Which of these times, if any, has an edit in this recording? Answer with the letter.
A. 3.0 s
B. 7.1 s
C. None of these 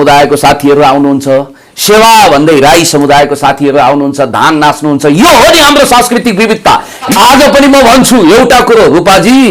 B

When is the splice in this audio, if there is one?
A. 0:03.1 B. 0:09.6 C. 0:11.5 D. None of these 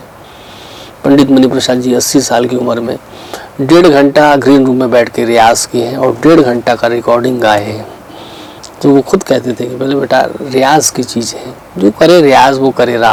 D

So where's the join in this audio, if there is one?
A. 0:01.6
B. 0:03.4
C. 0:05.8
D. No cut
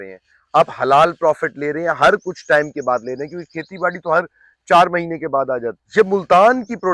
C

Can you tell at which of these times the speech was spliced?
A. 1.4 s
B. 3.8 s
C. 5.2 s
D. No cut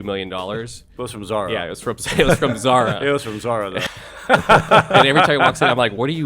B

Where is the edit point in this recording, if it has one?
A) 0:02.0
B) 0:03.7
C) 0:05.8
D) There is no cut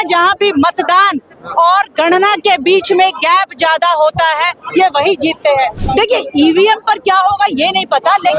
C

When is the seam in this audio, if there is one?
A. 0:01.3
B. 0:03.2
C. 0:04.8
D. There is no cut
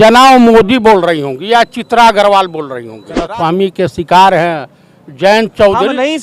B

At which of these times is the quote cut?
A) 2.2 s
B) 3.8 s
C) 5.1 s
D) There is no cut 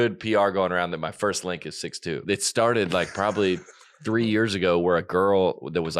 A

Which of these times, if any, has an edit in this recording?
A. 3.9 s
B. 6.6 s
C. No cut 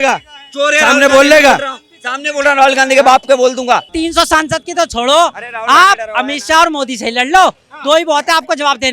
A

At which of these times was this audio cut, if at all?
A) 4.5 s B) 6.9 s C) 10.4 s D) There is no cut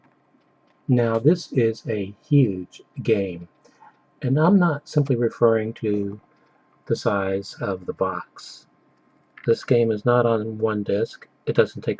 C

